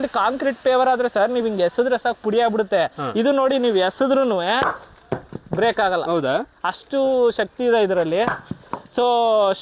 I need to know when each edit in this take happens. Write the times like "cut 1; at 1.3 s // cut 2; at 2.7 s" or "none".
none